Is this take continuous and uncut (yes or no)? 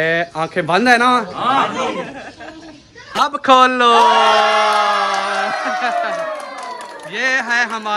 yes